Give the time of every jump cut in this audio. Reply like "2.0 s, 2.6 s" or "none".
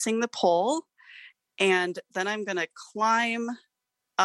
none